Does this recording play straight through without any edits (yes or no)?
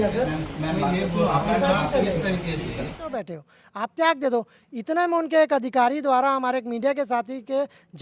no